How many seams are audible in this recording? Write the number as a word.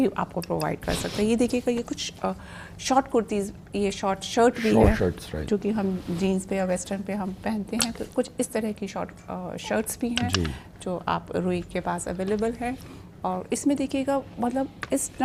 zero